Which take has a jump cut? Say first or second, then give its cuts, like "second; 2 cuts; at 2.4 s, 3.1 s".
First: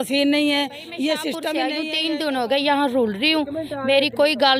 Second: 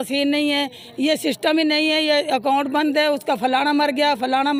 first; 1 cut; at 1.8 s